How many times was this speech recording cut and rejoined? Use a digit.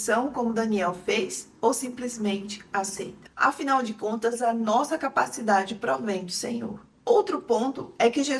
2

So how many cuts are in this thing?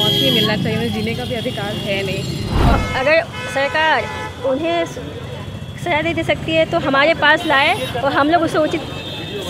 1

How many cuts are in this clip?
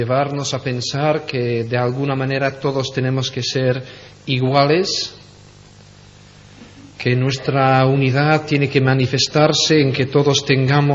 1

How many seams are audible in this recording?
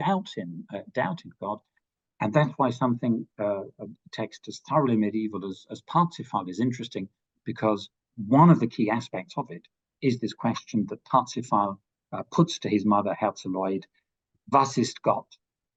0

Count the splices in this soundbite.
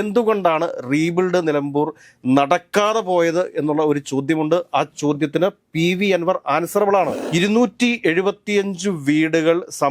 1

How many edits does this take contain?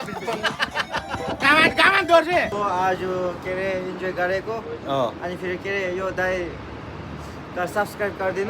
1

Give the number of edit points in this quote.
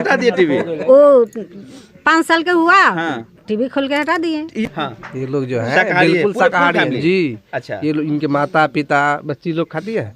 1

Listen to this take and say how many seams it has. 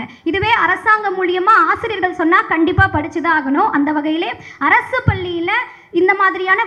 0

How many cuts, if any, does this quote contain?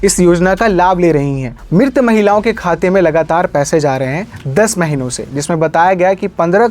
1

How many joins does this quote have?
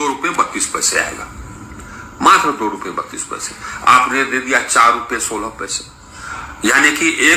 0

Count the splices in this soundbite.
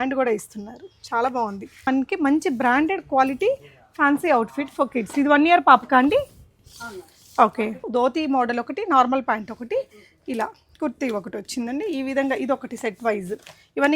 2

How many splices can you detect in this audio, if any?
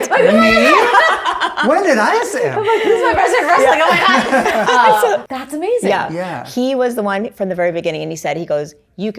1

